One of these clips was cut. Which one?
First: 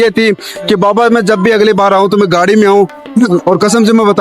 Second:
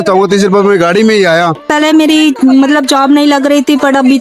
second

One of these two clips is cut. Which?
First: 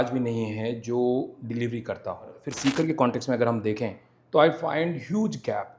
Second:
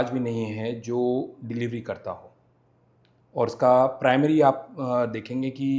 first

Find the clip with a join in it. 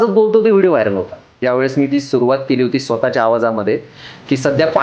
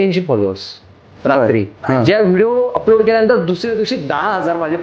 first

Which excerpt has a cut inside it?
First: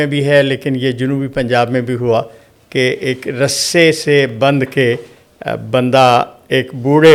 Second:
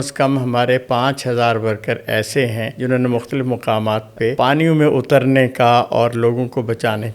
second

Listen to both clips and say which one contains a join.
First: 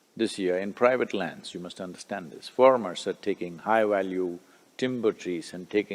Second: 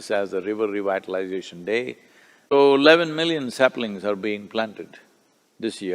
second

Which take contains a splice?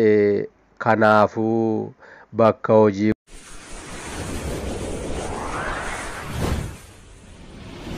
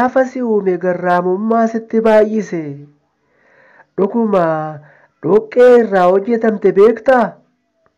first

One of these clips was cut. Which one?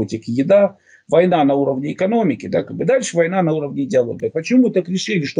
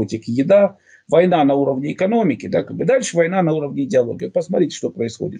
first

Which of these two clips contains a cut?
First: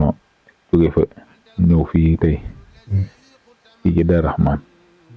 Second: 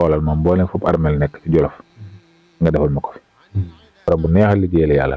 second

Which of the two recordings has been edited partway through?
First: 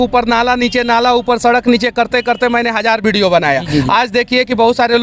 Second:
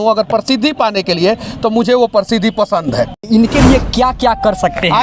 second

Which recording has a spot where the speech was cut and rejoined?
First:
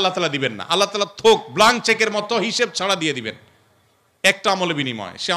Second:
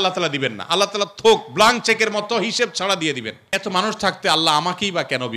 second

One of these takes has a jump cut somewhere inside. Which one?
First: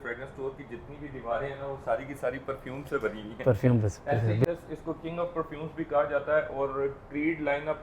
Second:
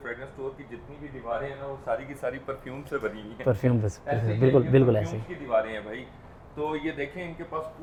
first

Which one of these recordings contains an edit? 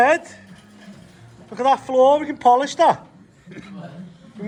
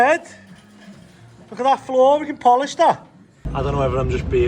second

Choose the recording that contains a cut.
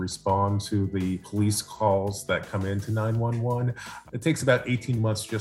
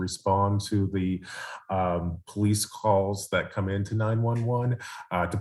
first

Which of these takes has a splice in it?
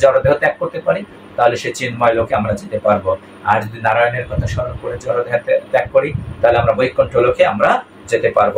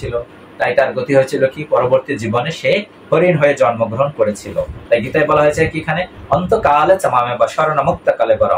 second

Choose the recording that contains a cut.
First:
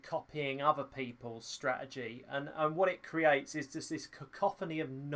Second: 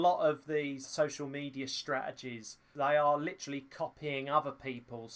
second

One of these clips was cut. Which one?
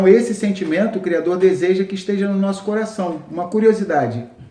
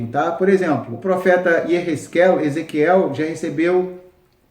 second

